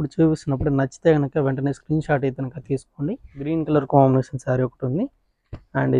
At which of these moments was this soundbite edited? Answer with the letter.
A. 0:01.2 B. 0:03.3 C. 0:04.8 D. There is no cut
B